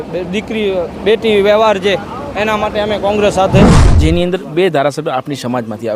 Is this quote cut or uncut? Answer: cut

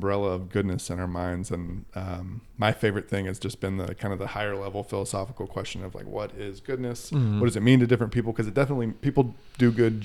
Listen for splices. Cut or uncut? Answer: uncut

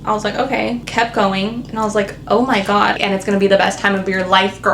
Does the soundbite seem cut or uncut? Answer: cut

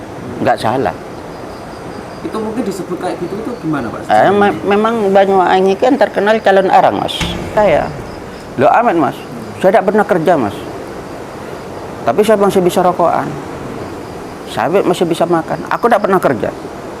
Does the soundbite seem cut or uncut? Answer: cut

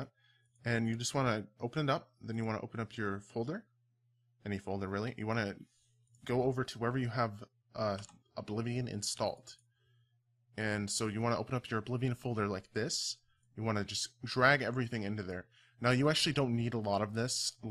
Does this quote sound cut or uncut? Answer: uncut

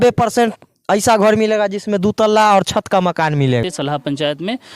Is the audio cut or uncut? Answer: cut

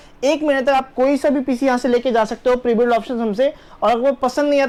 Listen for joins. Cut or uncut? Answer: uncut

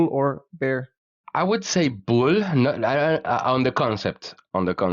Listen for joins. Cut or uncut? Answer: cut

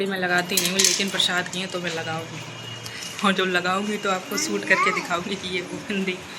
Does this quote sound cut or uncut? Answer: uncut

